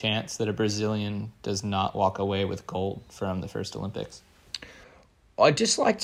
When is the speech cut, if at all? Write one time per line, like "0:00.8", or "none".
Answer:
none